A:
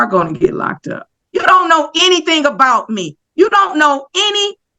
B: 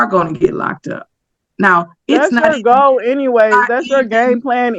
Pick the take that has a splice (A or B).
A